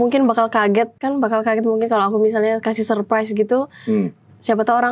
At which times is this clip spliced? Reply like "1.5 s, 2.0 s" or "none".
1.0 s